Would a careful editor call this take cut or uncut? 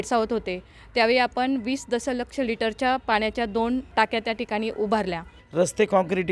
cut